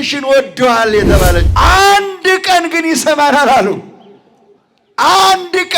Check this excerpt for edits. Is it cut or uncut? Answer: cut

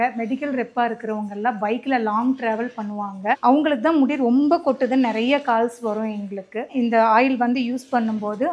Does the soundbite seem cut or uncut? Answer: cut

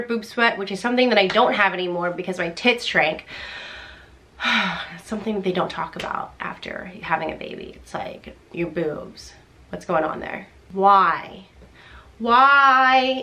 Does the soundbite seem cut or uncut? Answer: cut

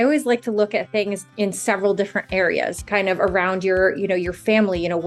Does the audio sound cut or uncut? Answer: cut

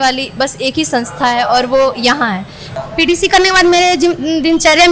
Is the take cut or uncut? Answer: cut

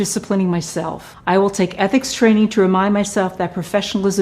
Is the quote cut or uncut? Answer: cut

